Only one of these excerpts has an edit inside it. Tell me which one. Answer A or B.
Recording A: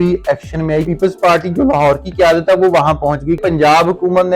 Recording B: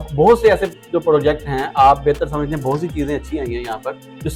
A